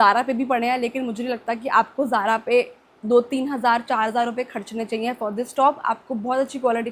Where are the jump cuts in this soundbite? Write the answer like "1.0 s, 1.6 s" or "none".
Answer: none